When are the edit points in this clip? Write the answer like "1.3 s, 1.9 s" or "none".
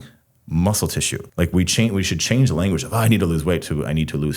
1.2 s